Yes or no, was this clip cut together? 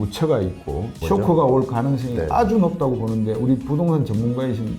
yes